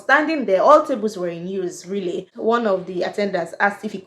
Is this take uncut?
no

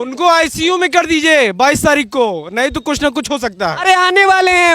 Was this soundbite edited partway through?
no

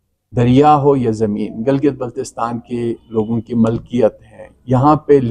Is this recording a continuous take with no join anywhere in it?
yes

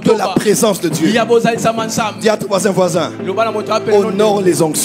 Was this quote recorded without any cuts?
yes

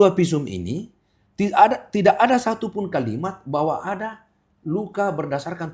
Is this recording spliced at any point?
no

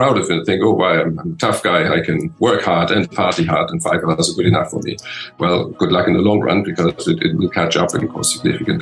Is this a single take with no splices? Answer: no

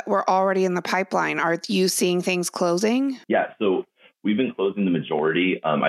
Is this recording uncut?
no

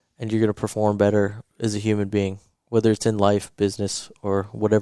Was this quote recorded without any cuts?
yes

